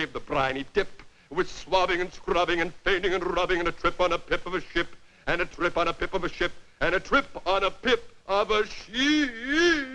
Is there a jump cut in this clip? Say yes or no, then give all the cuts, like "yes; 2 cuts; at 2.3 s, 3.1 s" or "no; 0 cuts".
yes; 1 cut; at 1.6 s